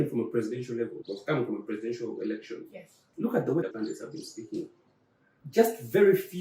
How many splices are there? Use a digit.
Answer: 2